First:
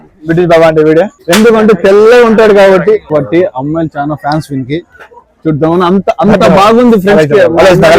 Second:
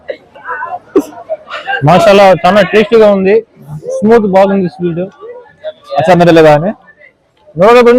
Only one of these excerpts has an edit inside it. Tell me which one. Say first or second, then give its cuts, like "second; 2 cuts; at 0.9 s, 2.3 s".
first; 2 cuts; at 1.2 s, 3.1 s